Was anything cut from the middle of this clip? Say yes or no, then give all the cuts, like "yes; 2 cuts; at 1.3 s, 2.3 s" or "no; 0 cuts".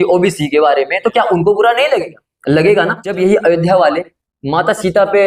yes; 1 cut; at 3.1 s